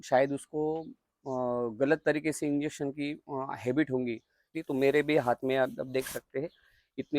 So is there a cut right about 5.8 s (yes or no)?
no